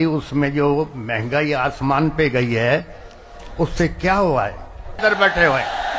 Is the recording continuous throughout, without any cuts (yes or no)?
no